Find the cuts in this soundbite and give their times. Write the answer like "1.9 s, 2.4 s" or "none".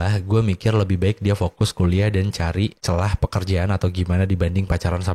2.8 s